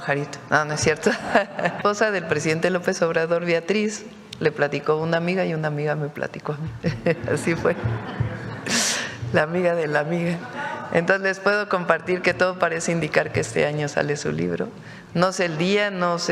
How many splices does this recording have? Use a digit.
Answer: 1